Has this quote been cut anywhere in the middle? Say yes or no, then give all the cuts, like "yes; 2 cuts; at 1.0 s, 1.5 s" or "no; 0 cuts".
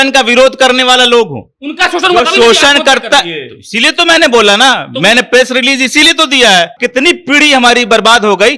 yes; 1 cut; at 6.7 s